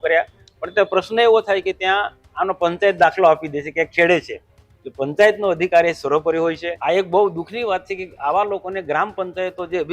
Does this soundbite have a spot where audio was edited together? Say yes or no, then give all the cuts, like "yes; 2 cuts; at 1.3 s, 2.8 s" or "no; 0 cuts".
yes; 1 cut; at 6.7 s